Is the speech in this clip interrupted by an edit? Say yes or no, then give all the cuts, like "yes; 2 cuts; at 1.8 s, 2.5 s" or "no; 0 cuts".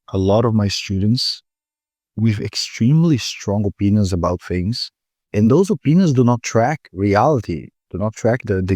no; 0 cuts